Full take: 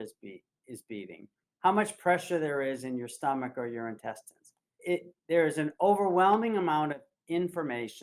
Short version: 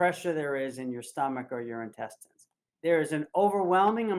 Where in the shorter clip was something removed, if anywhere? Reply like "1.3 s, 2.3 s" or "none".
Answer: 2.7 s